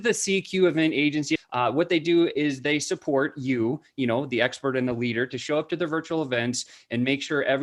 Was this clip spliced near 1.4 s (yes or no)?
yes